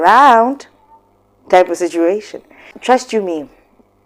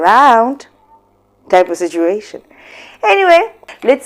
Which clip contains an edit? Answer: first; 1 cut; at 2.7 s

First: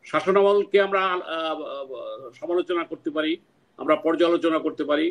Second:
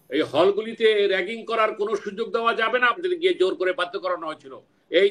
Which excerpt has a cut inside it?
second; 1 cut; at 3.0 s

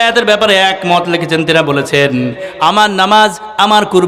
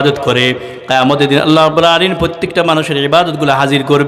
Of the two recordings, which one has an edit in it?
first; 1 cut; at 2.4 s

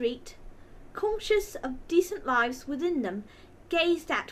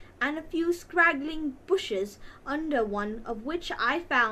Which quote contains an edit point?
first; 1 cut; at 3.0 s

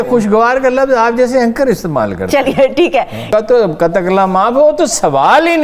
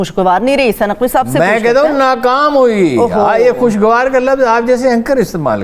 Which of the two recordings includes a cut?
first; 1 cut; at 3.2 s

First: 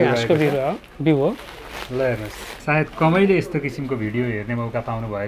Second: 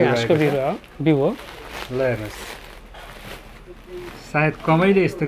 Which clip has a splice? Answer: first; 1 cut; at 2.5 s

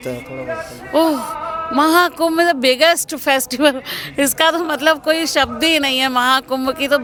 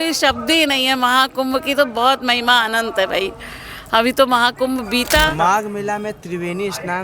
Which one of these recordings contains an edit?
second; 1 cut; at 5.3 s

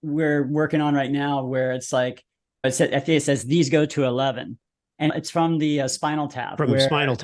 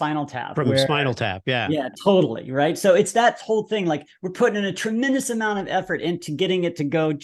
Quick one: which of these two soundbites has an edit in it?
first; 2 cuts; at 2.6 s, 5.1 s

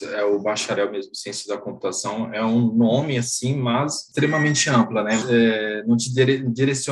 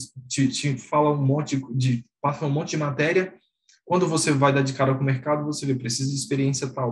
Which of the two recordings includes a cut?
first; 2 cuts; at 4.0 s, 5.2 s

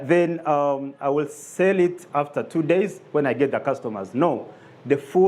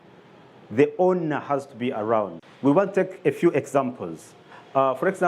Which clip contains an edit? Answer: second; 1 cut; at 2.4 s

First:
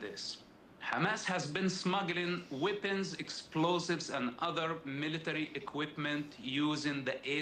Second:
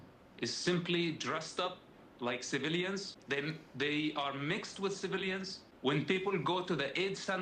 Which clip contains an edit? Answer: second; 2 cuts; at 3.1 s, 5.6 s

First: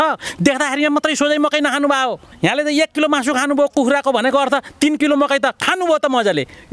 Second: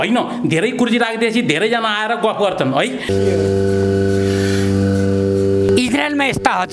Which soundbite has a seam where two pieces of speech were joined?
second; 2 cuts; at 3.0 s, 5.7 s

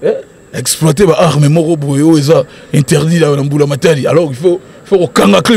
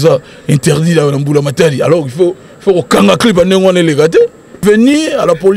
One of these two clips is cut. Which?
second; 1 cut; at 4.6 s

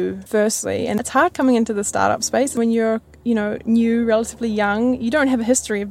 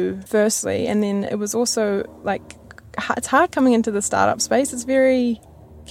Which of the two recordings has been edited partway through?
first; 2 cuts; at 1.0 s, 2.6 s

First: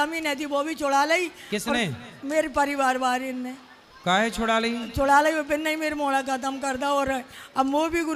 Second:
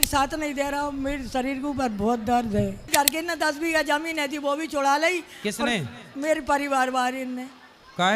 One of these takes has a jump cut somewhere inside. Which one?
second; 1 cut; at 2.8 s

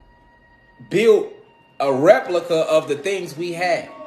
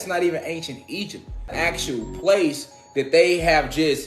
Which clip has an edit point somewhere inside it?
second; 1 cut; at 1.5 s

